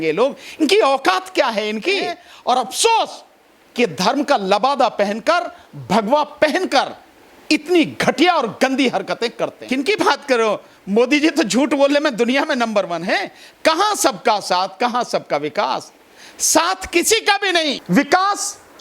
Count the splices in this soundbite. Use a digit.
3